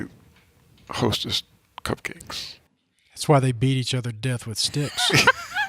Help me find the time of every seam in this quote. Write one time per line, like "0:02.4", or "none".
0:03.2